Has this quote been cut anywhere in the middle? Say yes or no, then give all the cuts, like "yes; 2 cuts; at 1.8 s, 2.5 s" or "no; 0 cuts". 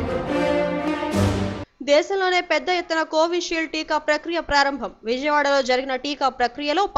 yes; 1 cut; at 1.6 s